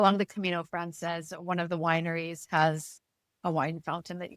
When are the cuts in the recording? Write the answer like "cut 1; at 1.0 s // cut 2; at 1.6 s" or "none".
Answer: none